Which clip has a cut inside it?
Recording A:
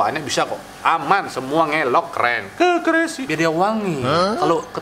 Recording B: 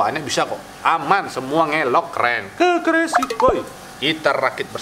A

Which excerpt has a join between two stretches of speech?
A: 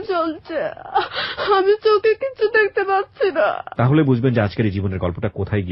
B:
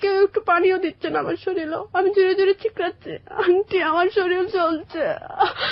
A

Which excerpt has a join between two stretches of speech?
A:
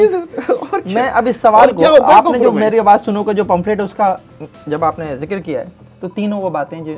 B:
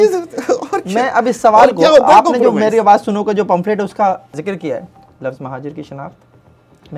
B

